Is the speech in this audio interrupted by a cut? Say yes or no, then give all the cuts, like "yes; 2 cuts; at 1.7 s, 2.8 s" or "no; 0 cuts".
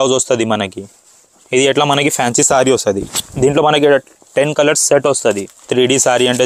yes; 1 cut; at 5.5 s